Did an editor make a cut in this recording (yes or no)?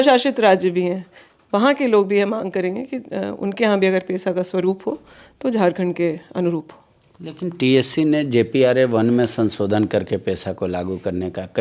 no